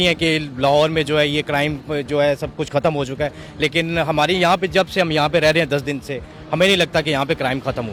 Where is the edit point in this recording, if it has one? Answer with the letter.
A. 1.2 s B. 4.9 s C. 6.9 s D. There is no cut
D